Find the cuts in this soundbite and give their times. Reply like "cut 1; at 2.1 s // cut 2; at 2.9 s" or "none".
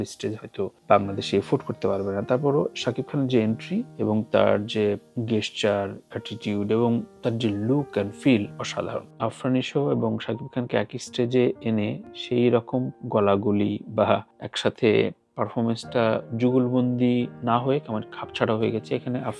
cut 1; at 9.1 s